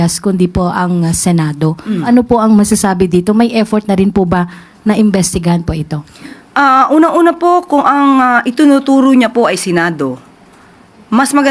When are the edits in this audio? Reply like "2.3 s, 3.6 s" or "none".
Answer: none